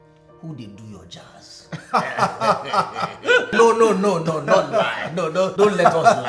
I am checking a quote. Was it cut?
yes; 2 cuts; at 3.5 s, 5.5 s

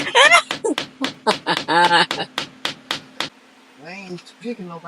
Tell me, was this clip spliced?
yes; 1 cut; at 3.4 s

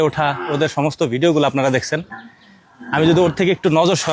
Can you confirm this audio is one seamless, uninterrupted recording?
yes; 0 cuts

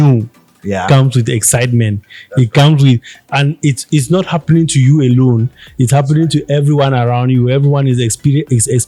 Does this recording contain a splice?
no; 0 cuts

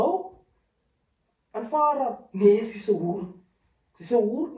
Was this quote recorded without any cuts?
yes; 0 cuts

